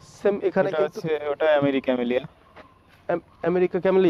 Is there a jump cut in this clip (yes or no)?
no